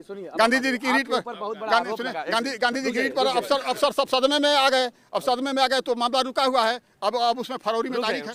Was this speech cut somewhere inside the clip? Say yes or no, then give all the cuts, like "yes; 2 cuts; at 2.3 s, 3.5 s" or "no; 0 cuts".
no; 0 cuts